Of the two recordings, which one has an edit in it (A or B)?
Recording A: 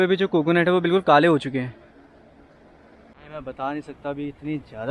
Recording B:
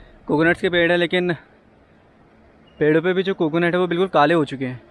A